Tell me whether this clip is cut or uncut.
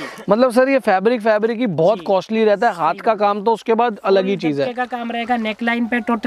uncut